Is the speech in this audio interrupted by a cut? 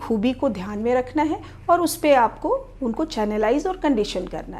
no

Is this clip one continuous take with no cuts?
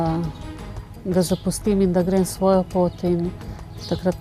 yes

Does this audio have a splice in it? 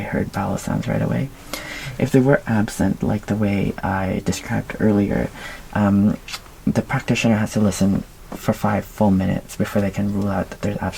no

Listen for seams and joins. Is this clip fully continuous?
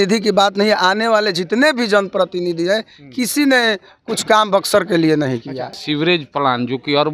no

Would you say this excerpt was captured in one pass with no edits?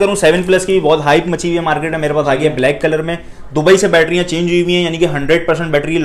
yes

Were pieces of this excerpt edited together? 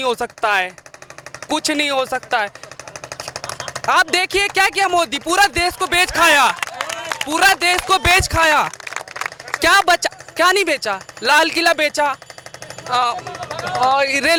no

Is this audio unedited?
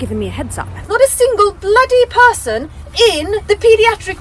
no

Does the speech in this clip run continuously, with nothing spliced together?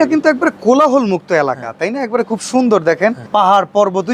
no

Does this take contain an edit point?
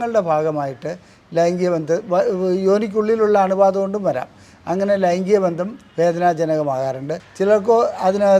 yes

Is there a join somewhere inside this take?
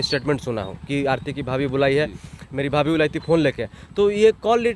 no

